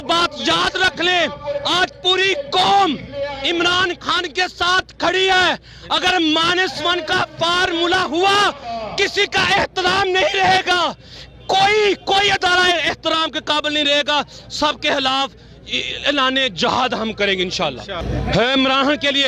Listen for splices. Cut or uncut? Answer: cut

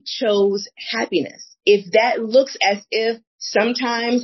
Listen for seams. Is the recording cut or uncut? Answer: cut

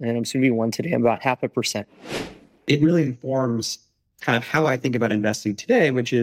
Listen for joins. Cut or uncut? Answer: cut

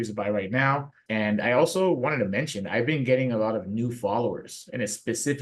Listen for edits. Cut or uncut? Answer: cut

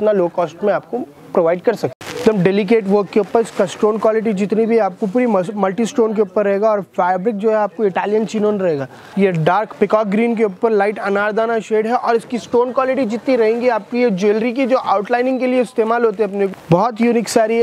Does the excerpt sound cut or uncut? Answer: cut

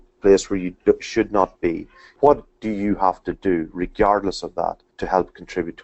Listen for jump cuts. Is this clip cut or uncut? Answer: cut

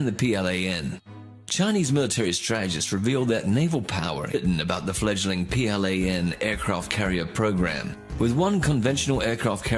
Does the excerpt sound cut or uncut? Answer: uncut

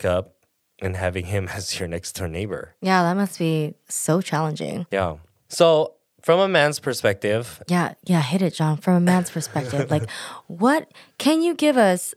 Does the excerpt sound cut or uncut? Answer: cut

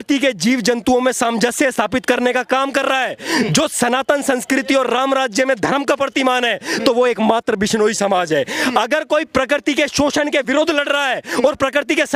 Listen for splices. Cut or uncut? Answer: uncut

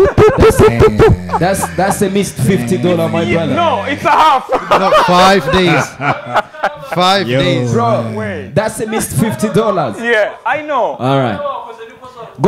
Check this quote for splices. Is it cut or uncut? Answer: uncut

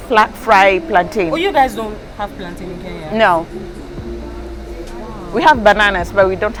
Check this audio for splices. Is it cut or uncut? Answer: uncut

